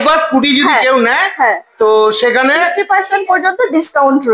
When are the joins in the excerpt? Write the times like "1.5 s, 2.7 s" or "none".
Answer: none